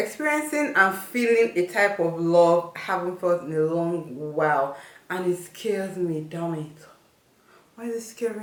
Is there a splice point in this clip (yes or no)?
no